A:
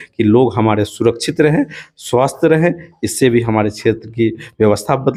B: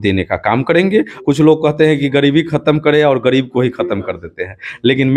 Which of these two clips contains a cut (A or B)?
B